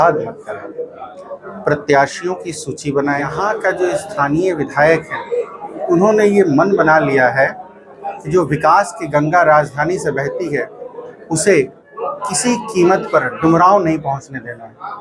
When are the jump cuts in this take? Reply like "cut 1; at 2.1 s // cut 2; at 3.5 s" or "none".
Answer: cut 1; at 3.4 s

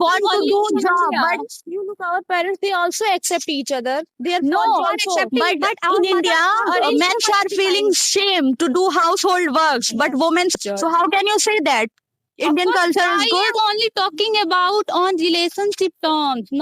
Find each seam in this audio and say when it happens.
cut 1; at 10.5 s

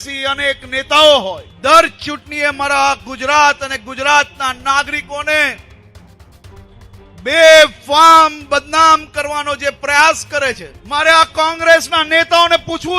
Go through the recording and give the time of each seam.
cut 1; at 1.5 s // cut 2; at 10.7 s

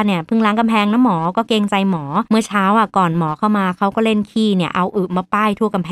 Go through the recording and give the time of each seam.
cut 1; at 2.2 s

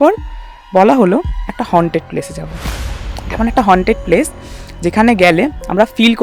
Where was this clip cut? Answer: none

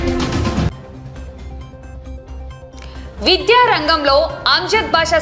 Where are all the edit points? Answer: cut 1; at 0.7 s // cut 2; at 2.7 s

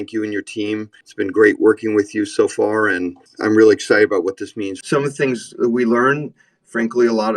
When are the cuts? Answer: cut 1; at 1.0 s // cut 2; at 3.2 s // cut 3; at 4.8 s

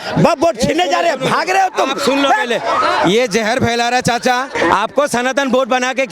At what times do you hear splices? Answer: cut 1; at 4.5 s

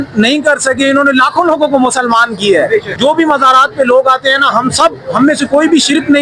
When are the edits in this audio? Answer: cut 1; at 2.9 s

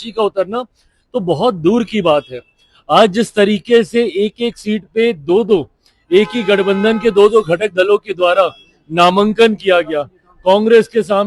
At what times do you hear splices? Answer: none

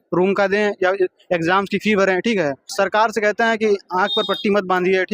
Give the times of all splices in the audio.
cut 1; at 2.6 s

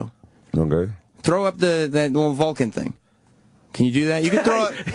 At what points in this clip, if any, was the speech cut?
cut 1; at 2.1 s

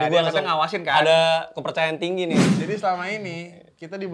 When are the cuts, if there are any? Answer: cut 1; at 2.5 s

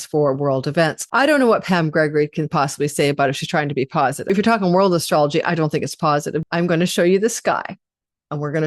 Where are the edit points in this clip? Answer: cut 1; at 1.0 s // cut 2; at 4.3 s // cut 3; at 6.4 s

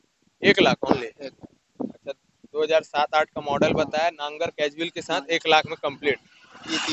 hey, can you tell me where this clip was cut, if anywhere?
none

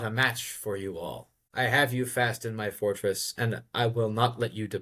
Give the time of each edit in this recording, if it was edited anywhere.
cut 1; at 1.3 s

